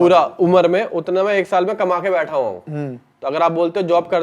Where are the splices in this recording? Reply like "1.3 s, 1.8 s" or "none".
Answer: none